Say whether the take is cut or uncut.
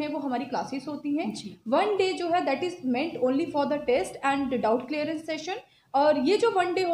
uncut